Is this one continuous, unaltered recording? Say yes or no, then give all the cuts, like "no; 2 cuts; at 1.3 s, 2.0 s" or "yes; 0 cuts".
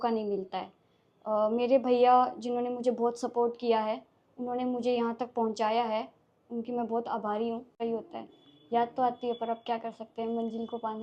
no; 1 cut; at 7.7 s